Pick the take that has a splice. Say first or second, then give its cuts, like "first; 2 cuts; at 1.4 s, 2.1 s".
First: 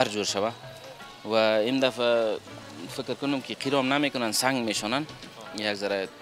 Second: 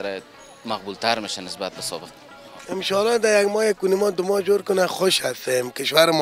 second; 1 cut; at 2.5 s